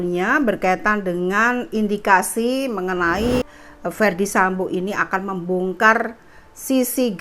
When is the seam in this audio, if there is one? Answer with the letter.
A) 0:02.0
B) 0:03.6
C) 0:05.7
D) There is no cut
B